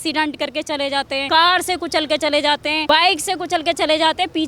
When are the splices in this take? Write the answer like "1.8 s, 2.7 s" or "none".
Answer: 1.2 s, 2.8 s